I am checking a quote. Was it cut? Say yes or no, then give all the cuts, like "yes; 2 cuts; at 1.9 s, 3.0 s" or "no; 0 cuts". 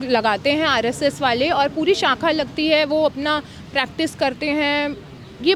no; 0 cuts